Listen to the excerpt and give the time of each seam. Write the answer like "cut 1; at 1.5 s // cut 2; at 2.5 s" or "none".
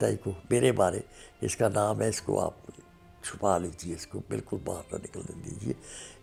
none

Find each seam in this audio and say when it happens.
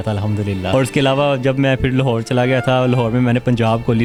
none

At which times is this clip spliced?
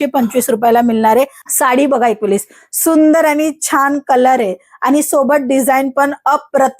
cut 1; at 1.4 s

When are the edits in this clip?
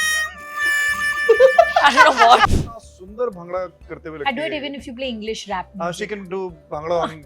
cut 1; at 2.5 s

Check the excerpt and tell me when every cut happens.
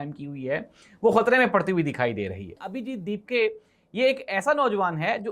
cut 1; at 2.7 s

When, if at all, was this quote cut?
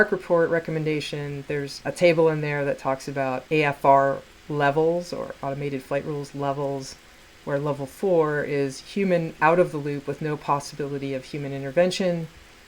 cut 1; at 1.7 s // cut 2; at 3.4 s

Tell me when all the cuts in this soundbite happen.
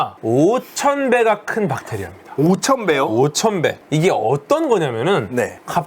cut 1; at 3.8 s

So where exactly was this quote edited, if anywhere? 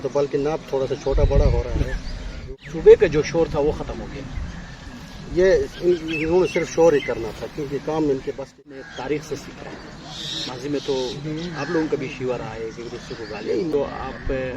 cut 1; at 2.4 s // cut 2; at 8.6 s // cut 3; at 13.7 s

